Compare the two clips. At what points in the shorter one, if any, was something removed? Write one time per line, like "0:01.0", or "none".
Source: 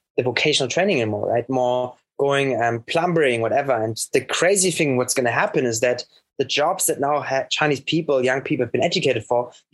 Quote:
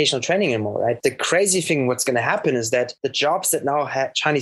0:01.0
0:03.0